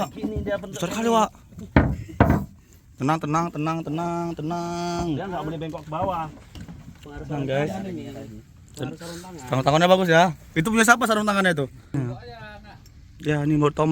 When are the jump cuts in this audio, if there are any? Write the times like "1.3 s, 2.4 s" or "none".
12.4 s